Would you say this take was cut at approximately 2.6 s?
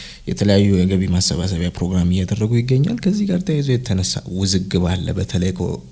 no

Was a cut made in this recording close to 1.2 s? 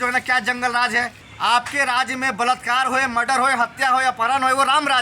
yes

